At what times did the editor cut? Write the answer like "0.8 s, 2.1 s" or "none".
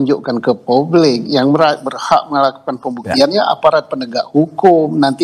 none